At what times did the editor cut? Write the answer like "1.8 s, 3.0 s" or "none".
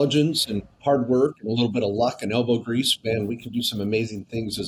none